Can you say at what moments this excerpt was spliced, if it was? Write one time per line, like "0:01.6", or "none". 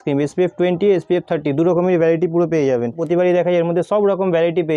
none